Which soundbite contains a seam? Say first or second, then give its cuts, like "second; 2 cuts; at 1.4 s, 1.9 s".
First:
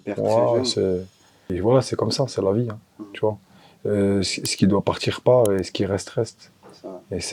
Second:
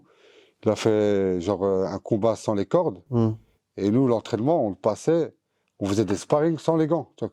first; 1 cut; at 1.5 s